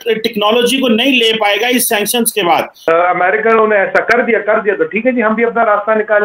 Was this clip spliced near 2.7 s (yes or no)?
yes